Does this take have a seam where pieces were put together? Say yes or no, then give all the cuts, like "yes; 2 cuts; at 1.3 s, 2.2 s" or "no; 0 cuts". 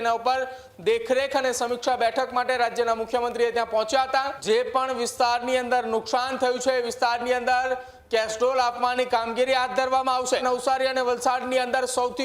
yes; 2 cuts; at 4.4 s, 10.4 s